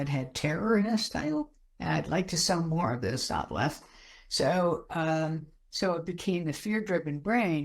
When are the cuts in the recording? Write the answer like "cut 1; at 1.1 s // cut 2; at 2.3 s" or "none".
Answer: none